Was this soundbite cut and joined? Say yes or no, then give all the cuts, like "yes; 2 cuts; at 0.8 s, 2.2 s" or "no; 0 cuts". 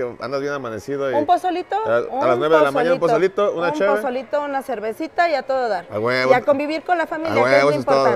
no; 0 cuts